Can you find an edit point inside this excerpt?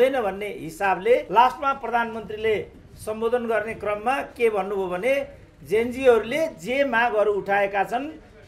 yes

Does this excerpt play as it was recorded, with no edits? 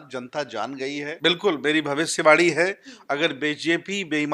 no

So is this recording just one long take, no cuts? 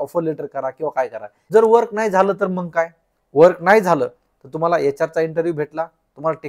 no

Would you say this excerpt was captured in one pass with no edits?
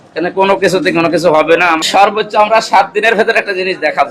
no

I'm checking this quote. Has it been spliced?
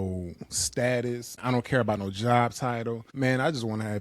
yes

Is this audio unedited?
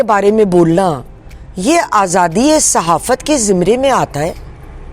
yes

